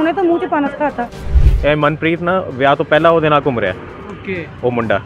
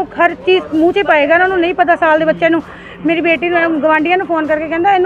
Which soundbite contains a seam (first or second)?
first